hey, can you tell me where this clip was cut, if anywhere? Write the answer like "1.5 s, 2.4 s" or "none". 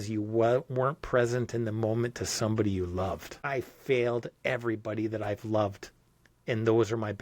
3.3 s